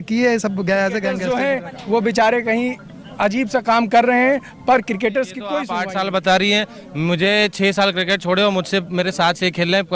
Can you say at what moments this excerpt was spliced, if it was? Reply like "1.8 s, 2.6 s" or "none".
1.2 s, 5.7 s